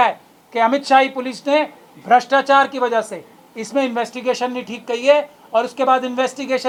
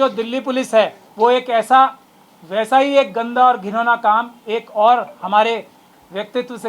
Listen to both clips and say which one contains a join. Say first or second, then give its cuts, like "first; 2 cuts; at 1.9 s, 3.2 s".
second; 1 cut; at 1.0 s